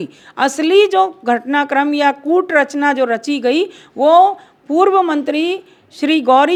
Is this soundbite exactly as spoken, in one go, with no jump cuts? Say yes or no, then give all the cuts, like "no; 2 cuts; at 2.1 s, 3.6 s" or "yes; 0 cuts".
yes; 0 cuts